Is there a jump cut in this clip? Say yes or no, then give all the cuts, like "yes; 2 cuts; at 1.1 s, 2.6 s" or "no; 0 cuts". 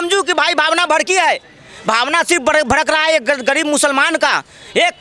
no; 0 cuts